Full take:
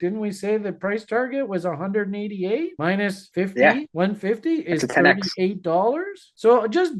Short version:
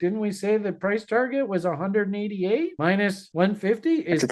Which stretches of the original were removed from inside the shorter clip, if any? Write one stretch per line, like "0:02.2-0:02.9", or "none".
0:03.3-0:03.9